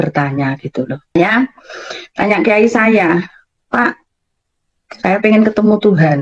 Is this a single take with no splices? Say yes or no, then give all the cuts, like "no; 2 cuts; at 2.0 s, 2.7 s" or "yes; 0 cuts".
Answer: no; 1 cut; at 1.1 s